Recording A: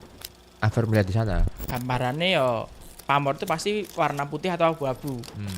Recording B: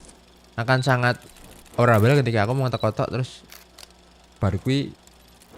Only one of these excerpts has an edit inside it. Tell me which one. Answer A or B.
A